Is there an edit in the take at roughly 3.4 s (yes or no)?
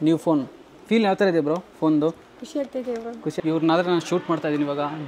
yes